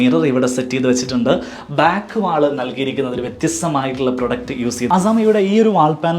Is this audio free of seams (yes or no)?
no